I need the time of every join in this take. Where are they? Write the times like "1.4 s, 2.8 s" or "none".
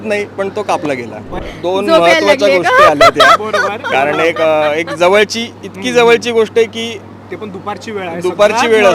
1.3 s